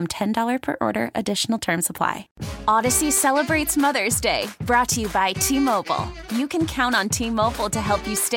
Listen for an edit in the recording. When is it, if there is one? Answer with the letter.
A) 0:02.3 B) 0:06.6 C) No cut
A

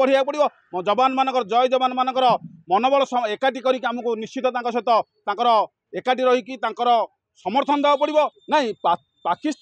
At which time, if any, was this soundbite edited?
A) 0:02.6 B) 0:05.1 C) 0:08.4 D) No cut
C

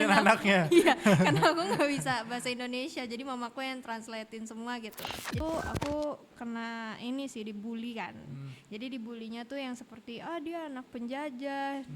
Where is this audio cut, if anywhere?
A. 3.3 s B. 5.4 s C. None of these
B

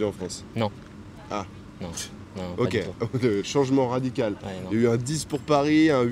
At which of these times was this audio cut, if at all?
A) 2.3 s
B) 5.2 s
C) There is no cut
C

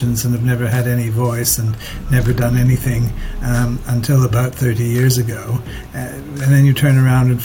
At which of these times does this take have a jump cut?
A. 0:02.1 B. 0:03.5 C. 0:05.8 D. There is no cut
C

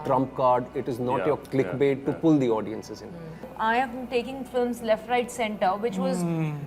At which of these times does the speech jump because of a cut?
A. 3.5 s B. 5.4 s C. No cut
A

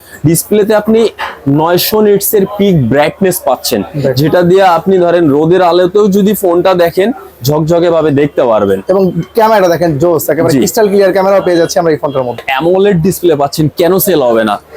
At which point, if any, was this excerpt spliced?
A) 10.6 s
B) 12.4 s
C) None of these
B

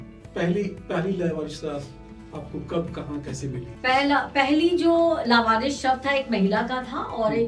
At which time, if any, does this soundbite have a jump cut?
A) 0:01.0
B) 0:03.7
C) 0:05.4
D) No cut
B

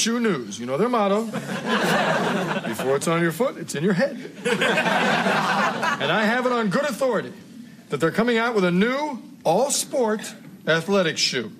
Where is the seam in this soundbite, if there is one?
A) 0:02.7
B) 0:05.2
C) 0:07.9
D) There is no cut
B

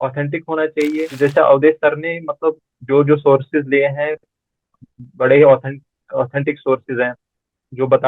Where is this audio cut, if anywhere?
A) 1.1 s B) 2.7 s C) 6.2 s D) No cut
A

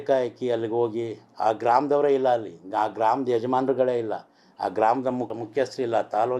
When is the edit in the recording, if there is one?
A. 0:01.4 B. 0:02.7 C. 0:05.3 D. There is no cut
C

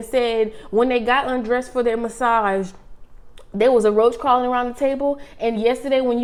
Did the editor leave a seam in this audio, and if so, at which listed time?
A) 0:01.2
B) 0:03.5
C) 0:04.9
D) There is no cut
D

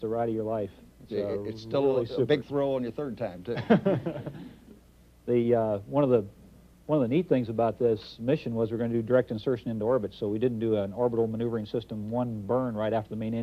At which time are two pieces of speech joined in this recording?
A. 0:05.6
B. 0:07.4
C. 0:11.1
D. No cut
C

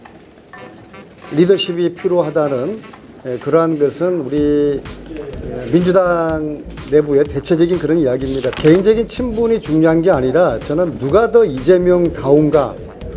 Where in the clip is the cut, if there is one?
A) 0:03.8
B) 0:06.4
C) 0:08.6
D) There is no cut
C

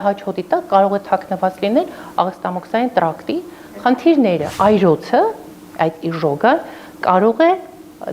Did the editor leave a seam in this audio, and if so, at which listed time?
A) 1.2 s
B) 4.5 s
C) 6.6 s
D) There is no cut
B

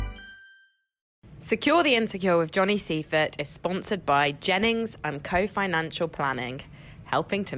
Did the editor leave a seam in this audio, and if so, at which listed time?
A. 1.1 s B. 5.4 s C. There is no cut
A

